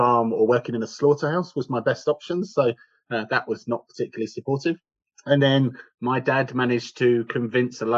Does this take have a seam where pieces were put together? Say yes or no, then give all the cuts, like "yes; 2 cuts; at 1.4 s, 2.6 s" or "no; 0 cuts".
no; 0 cuts